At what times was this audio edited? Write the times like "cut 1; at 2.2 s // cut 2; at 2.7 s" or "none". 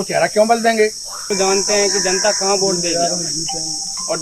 cut 1; at 1.3 s